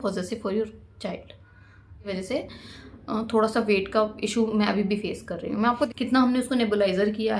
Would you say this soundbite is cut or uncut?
cut